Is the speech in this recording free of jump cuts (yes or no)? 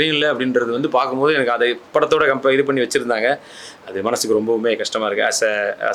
yes